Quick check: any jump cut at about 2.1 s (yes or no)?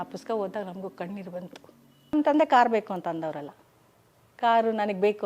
yes